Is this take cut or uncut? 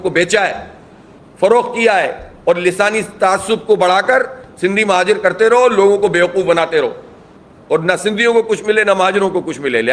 uncut